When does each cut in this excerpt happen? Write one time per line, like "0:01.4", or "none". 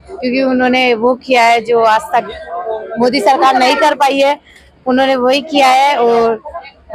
none